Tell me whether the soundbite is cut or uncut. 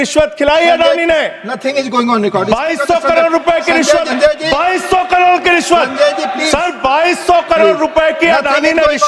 cut